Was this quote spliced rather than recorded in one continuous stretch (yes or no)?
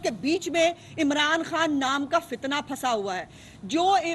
no